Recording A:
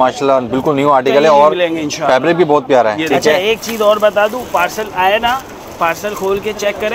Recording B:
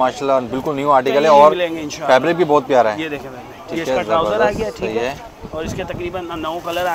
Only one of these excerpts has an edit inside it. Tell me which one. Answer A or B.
A